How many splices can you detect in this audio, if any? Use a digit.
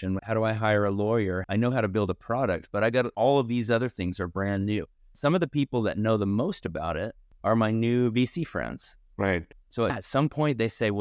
2